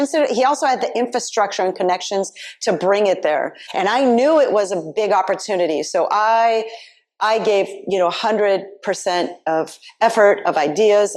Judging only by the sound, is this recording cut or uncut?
cut